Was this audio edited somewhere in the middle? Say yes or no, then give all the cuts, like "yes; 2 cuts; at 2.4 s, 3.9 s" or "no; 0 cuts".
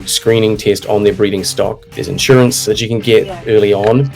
yes; 1 cut; at 1.8 s